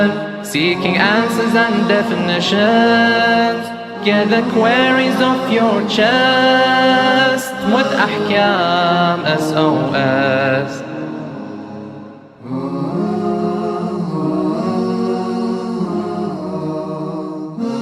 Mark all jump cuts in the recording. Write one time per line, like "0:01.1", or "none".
none

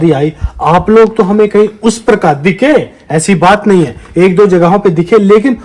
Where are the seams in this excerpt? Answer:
none

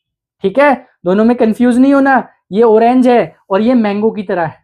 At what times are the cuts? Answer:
none

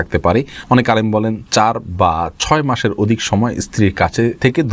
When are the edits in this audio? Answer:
none

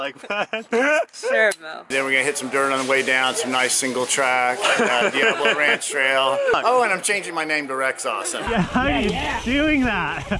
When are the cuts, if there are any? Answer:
0:01.9
0:06.5
0:08.5

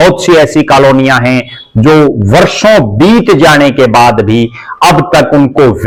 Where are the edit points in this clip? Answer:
none

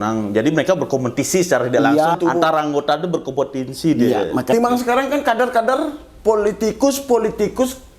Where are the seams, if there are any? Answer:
0:02.2
0:04.5

